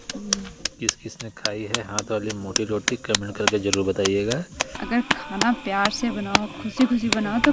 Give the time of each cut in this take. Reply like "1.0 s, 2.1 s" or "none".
4.8 s